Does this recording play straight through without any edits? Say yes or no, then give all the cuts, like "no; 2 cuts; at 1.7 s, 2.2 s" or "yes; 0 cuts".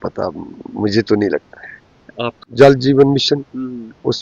no; 1 cut; at 2.4 s